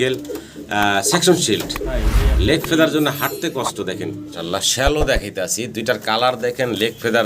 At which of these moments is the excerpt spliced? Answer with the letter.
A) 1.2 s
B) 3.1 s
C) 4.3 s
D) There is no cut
C